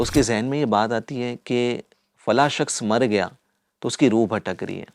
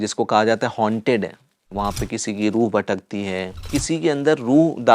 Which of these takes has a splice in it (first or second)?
second